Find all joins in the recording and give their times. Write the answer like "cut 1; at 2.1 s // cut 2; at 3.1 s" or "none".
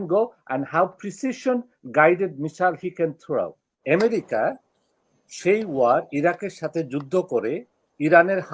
cut 1; at 3.7 s